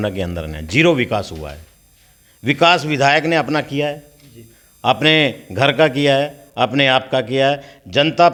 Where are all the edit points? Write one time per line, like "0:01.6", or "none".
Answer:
none